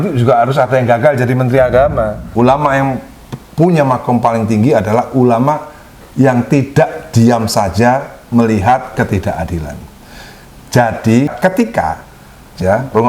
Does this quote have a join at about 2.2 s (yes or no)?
yes